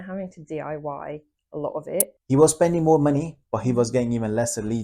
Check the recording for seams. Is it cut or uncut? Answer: cut